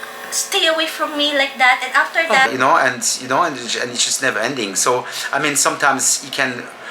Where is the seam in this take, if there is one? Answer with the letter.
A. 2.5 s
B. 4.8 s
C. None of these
A